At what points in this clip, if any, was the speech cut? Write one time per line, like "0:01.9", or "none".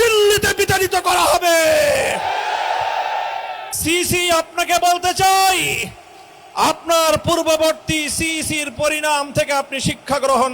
0:03.7